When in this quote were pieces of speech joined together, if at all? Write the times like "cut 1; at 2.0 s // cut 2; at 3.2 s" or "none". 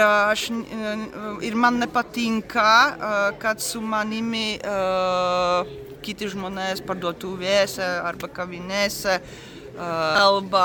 none